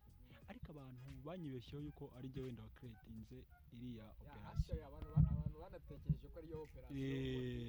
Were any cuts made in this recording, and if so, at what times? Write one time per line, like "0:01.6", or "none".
none

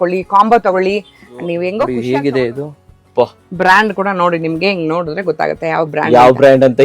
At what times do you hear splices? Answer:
0:02.0

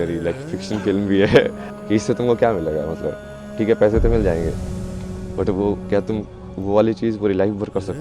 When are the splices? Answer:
0:01.7

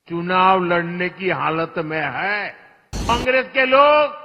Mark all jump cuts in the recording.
0:03.1

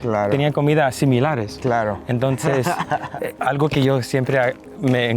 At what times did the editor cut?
0:03.3

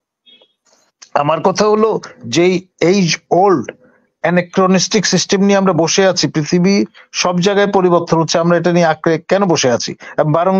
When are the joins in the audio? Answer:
none

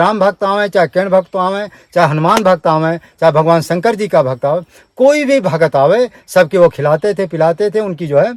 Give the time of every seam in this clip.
none

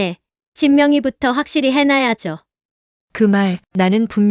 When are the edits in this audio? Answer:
0:03.2

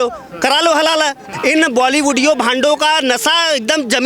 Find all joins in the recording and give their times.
0:01.3

